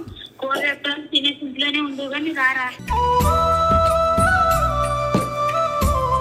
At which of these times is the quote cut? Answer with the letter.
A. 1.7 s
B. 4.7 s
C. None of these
C